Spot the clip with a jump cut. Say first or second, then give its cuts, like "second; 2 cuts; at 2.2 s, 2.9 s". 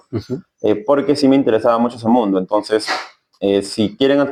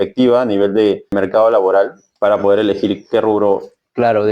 second; 2 cuts; at 1.1 s, 2.0 s